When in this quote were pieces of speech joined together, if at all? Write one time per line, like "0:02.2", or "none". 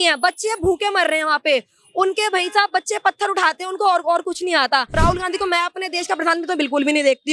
0:04.9